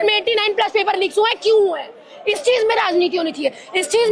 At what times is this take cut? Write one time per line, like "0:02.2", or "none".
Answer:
none